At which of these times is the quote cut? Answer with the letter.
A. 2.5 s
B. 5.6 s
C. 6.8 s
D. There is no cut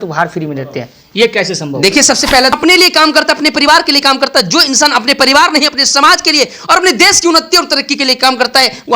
A